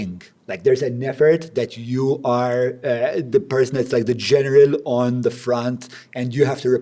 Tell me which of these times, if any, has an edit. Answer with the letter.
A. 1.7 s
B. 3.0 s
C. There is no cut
C